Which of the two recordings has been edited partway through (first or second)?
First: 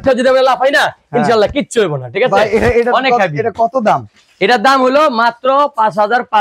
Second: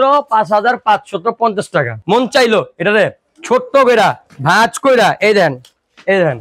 second